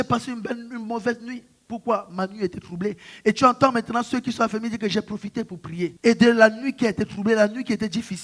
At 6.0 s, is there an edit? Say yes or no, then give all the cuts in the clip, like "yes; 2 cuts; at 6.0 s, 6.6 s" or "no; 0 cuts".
yes; 1 cut; at 6.0 s